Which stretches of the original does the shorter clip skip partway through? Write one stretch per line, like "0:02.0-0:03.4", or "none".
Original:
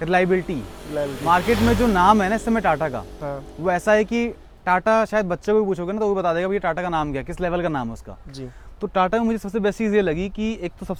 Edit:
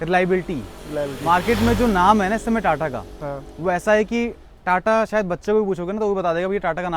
none